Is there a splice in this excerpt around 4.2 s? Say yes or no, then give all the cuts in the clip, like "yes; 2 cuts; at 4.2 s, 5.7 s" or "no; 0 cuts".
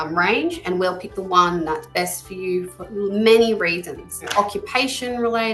yes; 1 cut; at 4.2 s